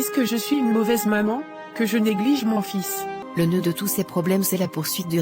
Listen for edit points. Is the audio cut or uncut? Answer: cut